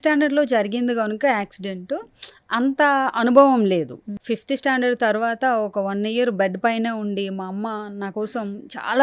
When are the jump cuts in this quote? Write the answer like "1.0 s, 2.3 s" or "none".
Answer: 4.2 s